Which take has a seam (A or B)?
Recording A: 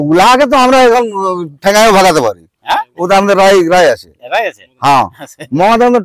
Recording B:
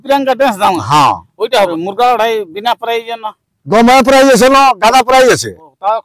B